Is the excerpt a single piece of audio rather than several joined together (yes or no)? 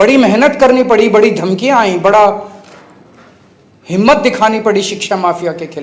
yes